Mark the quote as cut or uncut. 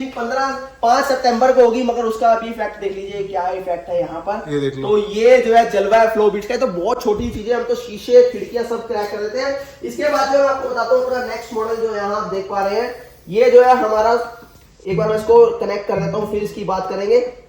uncut